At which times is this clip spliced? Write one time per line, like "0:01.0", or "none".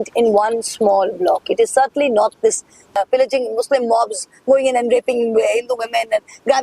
0:02.9